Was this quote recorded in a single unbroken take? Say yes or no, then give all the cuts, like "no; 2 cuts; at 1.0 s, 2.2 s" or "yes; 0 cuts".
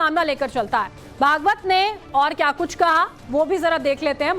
yes; 0 cuts